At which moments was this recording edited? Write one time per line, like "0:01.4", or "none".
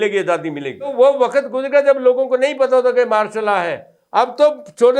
0:00.9